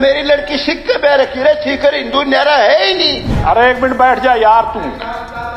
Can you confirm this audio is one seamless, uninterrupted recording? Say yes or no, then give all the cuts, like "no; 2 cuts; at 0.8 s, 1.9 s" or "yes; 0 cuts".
no; 1 cut; at 3.3 s